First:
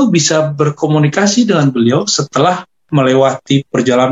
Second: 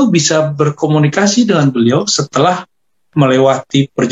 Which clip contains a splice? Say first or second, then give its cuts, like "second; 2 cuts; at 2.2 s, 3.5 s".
first; 1 cut; at 2.7 s